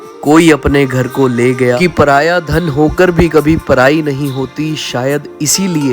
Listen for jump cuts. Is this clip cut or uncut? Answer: cut